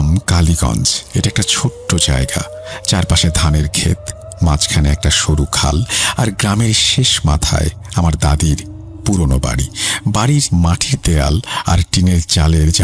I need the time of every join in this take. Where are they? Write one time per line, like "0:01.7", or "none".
none